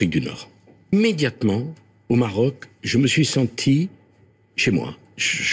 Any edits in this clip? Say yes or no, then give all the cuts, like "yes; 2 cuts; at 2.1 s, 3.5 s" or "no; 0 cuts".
yes; 1 cut; at 0.9 s